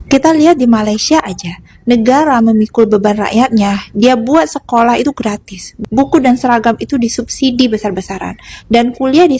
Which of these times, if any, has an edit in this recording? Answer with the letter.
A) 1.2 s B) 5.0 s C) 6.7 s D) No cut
D